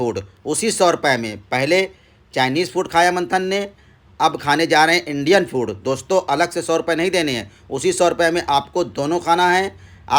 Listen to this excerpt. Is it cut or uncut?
uncut